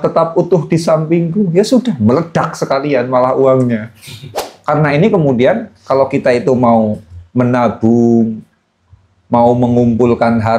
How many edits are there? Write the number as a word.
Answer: one